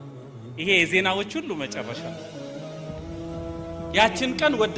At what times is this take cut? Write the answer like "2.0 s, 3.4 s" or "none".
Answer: 1.9 s, 3.6 s